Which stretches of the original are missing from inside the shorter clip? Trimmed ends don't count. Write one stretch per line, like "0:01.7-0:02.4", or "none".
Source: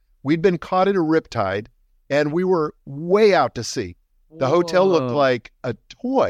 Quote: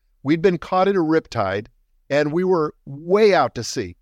none